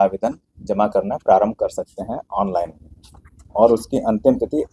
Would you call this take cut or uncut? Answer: uncut